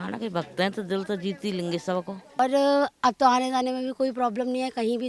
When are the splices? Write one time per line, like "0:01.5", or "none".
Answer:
0:02.4